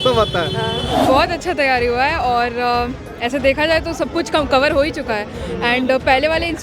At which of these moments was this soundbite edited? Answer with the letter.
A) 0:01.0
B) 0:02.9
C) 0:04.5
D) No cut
A